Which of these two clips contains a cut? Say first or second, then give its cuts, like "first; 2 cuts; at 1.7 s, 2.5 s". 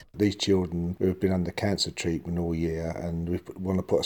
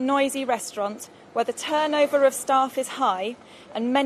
first; 1 cut; at 0.9 s